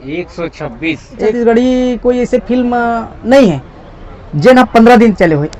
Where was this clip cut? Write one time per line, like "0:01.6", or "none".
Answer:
0:01.2